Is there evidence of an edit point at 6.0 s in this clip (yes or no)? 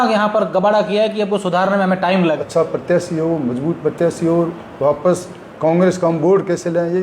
no